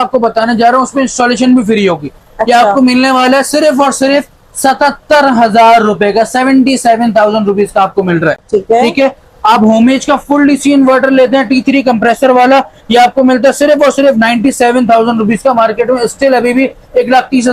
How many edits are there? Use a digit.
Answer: 0